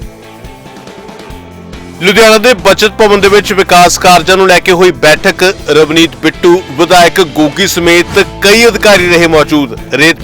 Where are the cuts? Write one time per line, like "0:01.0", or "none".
0:01.3